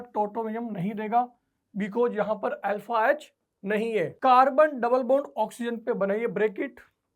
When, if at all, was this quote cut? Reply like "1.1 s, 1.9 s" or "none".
4.1 s